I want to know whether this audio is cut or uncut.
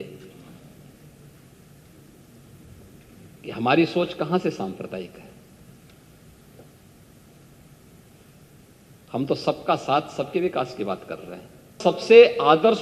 cut